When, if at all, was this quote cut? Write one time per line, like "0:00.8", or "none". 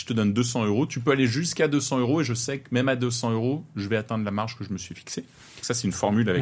none